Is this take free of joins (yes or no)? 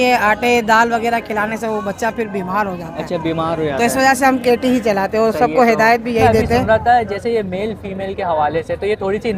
no